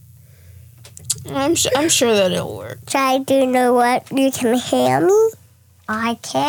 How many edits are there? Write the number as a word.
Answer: one